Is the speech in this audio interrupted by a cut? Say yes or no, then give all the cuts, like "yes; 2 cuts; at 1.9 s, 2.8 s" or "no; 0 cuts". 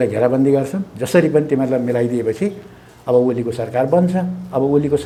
no; 0 cuts